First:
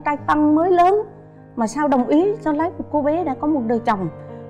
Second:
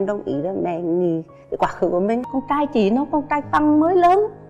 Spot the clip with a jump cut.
second; 1 cut; at 2.3 s

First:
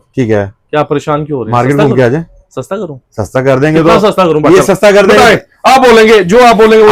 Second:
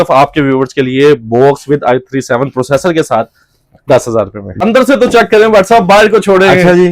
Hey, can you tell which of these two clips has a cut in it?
second; 1 cut; at 4.6 s

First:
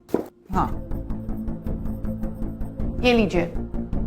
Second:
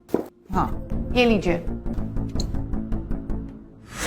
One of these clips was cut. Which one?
second; 2 cuts; at 0.8 s, 2.0 s

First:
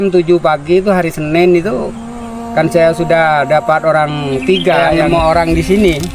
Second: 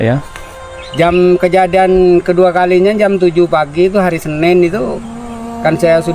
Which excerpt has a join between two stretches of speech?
first; 1 cut; at 4.9 s

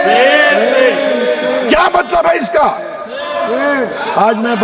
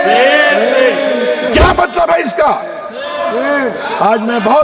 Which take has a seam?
second; 1 cut; at 1.5 s

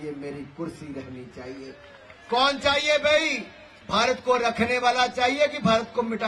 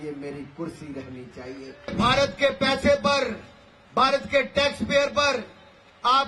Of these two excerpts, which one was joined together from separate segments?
second; 1 cut; at 1.9 s

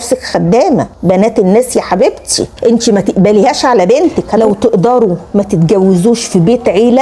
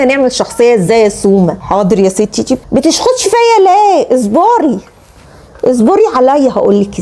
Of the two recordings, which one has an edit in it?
first; 2 cuts; at 2.5 s, 4.3 s

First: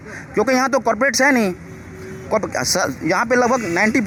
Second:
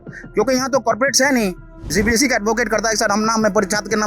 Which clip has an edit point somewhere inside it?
second; 1 cut; at 1.8 s

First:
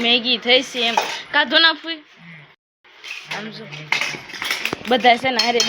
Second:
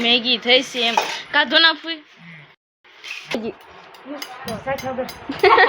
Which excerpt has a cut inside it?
second; 1 cut; at 3.4 s

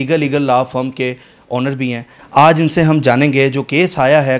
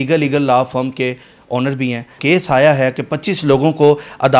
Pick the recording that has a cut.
second; 1 cut; at 2.1 s

